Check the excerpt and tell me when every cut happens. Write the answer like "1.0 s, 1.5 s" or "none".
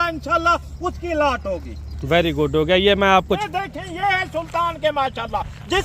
3.4 s